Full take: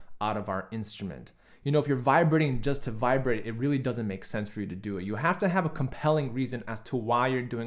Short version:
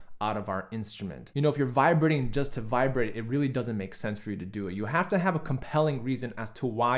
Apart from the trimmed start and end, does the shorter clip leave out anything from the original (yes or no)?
yes